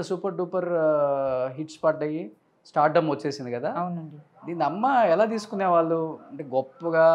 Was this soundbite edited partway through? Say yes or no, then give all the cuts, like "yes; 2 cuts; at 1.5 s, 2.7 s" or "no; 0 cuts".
no; 0 cuts